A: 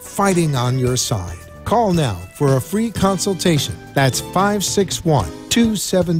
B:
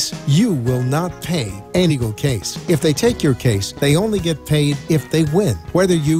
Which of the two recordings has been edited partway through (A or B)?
B